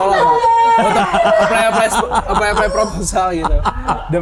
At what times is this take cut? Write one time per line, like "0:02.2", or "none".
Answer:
none